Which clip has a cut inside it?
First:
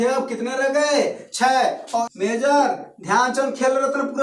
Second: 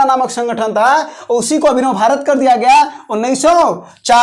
first; 1 cut; at 2.1 s

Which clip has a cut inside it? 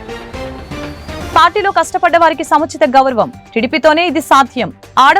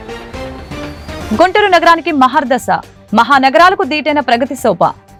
first; 1 cut; at 1.3 s

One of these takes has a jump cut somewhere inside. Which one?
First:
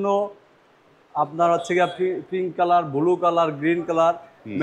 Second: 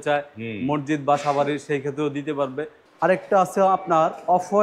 second; 1 cut; at 2.8 s

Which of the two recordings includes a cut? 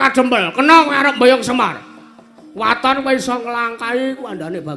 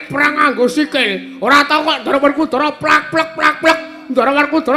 first; 1 cut; at 3.5 s

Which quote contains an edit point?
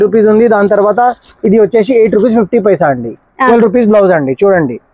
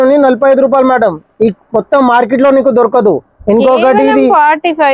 first; 1 cut; at 3.5 s

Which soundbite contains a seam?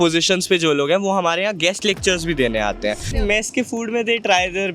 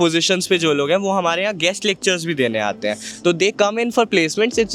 first; 1 cut; at 3.1 s

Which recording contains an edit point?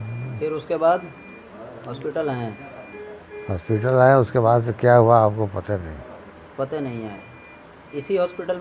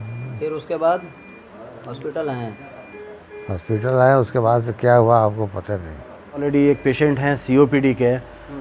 second; 1 cut; at 6.4 s

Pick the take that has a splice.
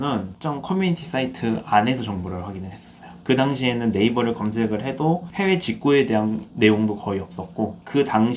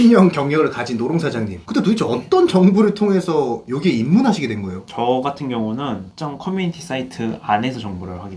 second; 1 cut; at 1.5 s

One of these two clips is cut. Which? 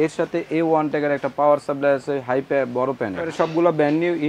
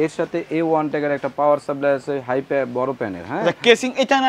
first; 1 cut; at 3.3 s

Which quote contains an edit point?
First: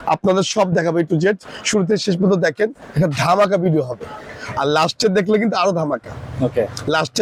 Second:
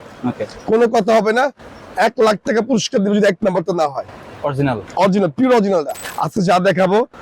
second; 1 cut; at 6.0 s

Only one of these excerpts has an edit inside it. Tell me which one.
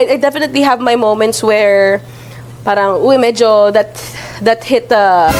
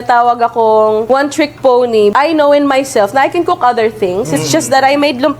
second; 2 cuts; at 1.0 s, 2.1 s

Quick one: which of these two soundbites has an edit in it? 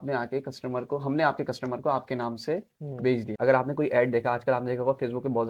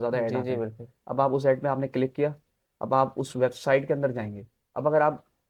first; 1 cut; at 3.3 s

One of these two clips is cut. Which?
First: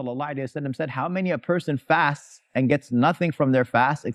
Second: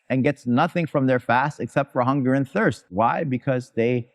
second; 1 cut; at 2.9 s

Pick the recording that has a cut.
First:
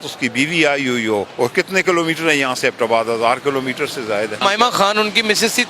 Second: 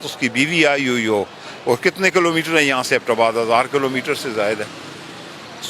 first; 2 cuts; at 1.3 s, 4.4 s

